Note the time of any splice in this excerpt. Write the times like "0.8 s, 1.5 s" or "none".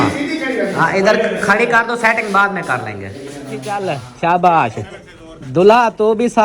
3.7 s